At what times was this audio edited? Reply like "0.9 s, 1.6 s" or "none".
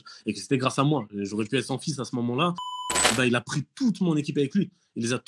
2.9 s